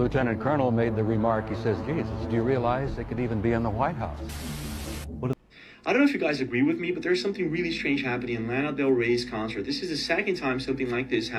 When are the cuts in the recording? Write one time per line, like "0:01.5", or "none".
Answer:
0:05.3